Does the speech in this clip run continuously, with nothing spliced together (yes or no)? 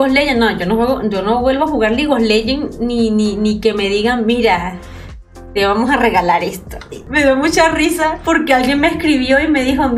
no